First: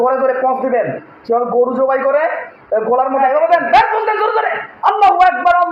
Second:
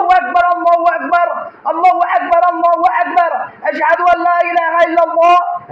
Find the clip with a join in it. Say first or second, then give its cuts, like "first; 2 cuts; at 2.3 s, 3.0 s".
first; 1 cut; at 3.2 s